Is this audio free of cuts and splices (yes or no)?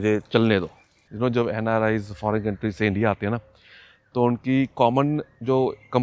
no